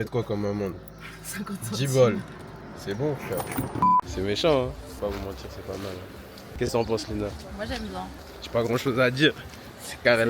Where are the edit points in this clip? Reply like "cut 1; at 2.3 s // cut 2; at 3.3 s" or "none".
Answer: cut 1; at 4.0 s // cut 2; at 6.4 s // cut 3; at 8.2 s